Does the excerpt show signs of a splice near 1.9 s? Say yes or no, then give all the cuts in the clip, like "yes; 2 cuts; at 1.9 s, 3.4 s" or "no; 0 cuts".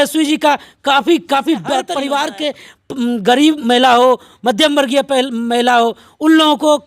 yes; 1 cut; at 1.9 s